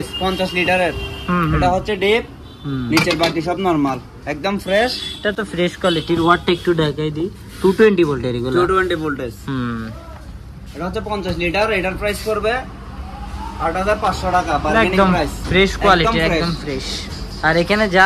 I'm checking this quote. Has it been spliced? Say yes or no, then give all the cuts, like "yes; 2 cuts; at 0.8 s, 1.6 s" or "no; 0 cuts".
no; 0 cuts